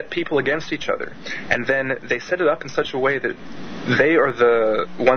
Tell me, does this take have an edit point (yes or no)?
yes